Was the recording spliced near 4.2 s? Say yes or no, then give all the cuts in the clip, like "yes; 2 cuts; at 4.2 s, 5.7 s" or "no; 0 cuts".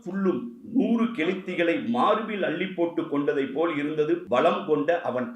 yes; 1 cut; at 4.2 s